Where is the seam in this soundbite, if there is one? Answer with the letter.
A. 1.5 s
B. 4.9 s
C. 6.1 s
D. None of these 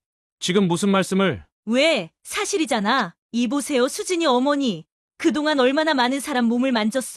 A